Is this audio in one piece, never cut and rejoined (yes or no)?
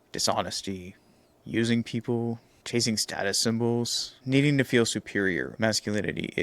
no